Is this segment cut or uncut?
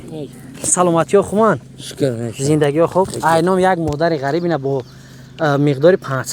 uncut